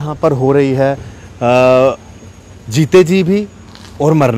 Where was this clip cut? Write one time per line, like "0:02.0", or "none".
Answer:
none